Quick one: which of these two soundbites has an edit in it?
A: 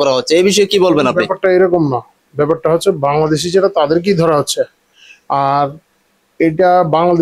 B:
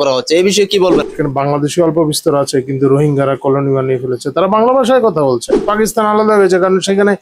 B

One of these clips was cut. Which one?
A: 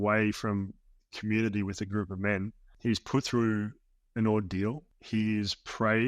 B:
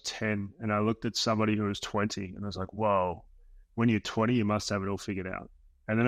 A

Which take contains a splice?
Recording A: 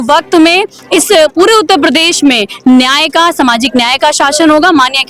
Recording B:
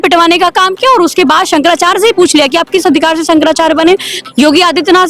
B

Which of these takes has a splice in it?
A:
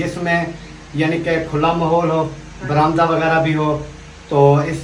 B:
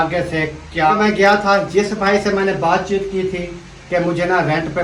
B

